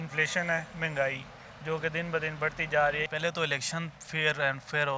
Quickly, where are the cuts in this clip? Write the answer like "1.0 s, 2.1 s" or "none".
3.1 s